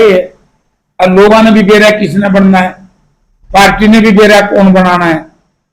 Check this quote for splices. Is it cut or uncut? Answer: uncut